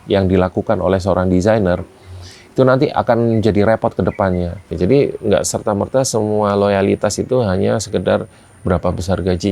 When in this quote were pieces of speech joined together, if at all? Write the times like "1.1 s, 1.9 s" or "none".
4.7 s